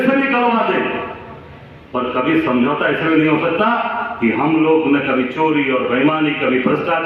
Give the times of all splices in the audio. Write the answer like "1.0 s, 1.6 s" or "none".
none